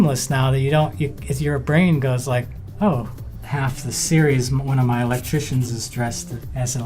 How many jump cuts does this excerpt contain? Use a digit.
2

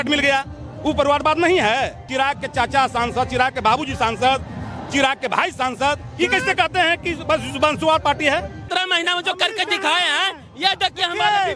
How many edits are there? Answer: 2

